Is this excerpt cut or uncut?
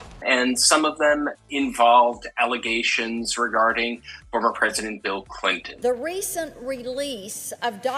cut